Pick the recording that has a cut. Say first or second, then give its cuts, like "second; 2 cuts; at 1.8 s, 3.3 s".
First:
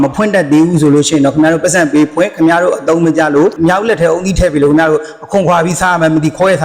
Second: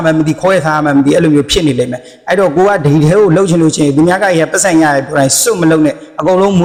first; 1 cut; at 3.6 s